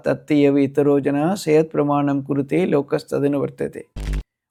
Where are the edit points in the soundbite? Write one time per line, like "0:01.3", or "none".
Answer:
none